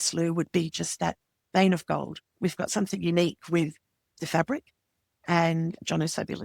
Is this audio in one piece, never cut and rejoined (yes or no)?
no